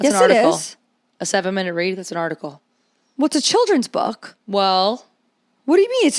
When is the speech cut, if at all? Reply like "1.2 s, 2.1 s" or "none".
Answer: none